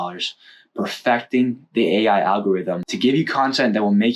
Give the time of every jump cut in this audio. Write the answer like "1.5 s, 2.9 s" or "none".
2.9 s